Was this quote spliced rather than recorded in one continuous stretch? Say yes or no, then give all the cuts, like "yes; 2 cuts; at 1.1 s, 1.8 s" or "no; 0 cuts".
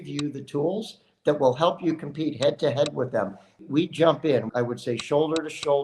yes; 2 cuts; at 3.5 s, 4.5 s